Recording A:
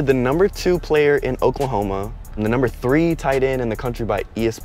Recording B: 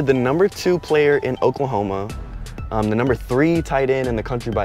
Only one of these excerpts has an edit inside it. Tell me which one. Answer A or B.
A